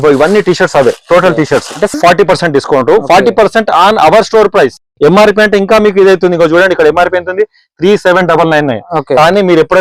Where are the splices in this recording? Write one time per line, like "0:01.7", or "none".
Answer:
0:01.9